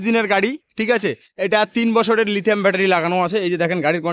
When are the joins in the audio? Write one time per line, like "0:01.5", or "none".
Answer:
none